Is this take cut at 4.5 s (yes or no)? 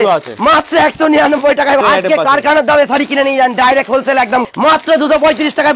yes